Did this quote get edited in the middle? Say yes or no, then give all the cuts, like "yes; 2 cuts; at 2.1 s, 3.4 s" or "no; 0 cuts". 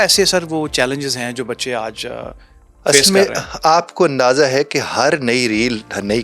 no; 0 cuts